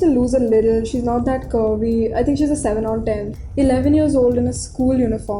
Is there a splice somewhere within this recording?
yes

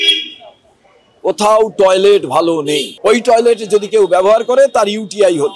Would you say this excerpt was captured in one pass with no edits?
no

